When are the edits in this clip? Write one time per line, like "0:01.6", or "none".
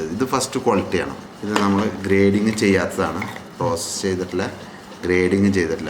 0:01.2